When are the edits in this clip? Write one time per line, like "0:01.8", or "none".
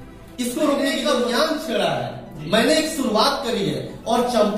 0:01.0